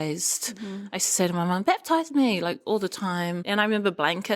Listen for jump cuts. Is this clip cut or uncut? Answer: cut